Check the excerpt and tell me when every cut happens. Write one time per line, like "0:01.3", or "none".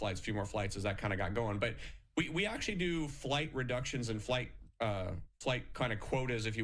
none